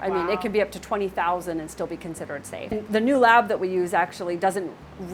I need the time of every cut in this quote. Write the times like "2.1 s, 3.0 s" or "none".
2.7 s